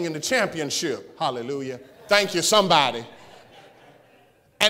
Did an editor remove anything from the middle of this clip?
yes; 1 cut; at 1.9 s

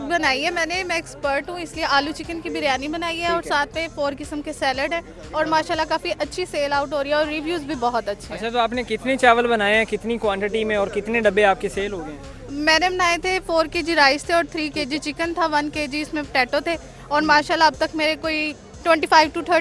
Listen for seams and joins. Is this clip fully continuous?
yes; 0 cuts

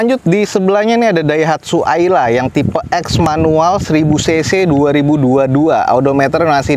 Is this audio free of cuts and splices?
yes; 0 cuts

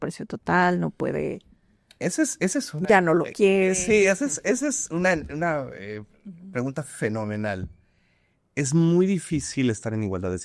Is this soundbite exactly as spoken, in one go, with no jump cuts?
yes; 0 cuts

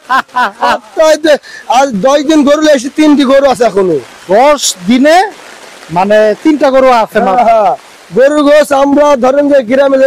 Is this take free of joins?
yes; 0 cuts

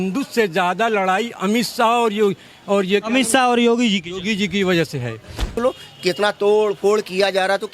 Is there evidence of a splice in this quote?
yes; 1 cut; at 5.5 s

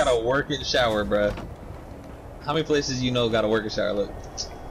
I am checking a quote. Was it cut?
no; 0 cuts

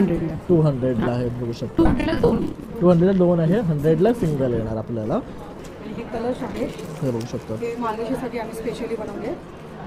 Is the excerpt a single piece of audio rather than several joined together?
no; 1 cut; at 5.4 s

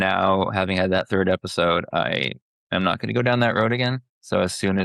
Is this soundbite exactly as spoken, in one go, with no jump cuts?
no; 1 cut; at 1.1 s

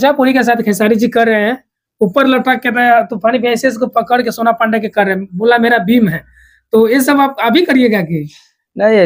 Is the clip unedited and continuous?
yes; 0 cuts

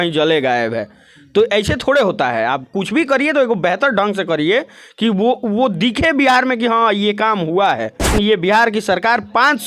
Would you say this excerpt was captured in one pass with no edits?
no; 1 cut; at 8.1 s

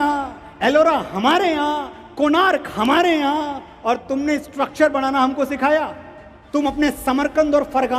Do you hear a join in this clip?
no; 0 cuts

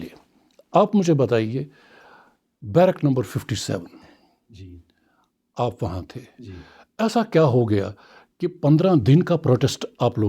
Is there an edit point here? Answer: no; 0 cuts

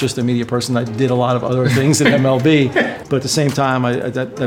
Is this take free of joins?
no; 1 cut; at 3.0 s

